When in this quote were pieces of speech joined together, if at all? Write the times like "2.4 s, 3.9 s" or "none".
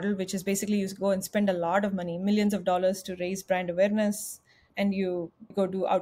none